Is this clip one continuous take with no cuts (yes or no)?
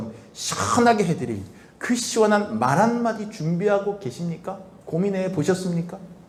yes